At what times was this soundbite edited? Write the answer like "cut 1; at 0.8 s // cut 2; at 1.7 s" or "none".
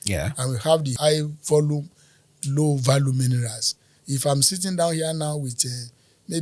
cut 1; at 0.9 s